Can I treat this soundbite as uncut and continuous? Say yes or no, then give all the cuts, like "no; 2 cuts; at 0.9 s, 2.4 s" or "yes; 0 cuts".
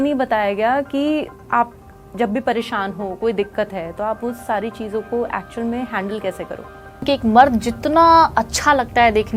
no; 1 cut; at 7.0 s